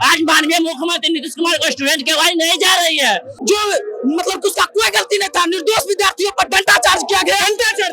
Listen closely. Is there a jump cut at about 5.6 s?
no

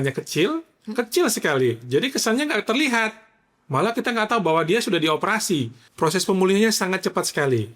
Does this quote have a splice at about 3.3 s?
no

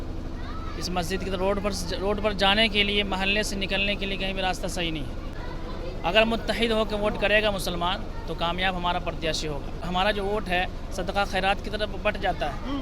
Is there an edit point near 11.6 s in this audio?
no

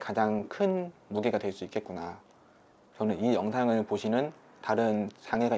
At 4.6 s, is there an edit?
no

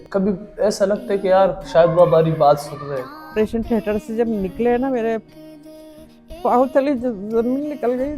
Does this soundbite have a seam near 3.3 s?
yes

